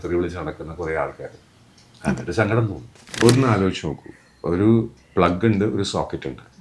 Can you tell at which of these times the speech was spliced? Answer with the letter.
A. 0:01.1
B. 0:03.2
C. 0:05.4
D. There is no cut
B